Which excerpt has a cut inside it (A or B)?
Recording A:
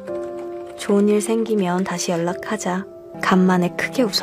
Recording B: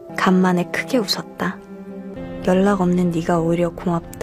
B